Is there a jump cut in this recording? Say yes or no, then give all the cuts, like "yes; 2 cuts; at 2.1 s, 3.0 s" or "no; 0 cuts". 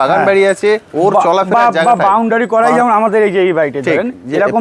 no; 0 cuts